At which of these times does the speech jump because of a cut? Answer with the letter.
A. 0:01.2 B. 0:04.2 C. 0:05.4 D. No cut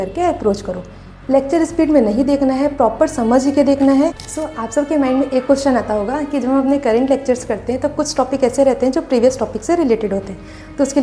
B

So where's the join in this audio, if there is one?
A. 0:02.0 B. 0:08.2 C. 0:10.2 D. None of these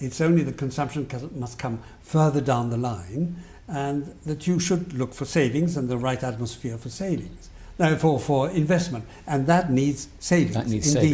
D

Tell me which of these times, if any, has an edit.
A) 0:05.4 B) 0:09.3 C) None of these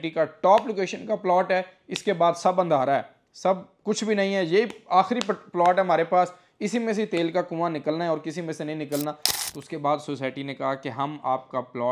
B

